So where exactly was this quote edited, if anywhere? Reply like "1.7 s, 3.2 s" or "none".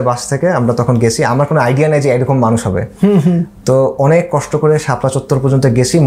none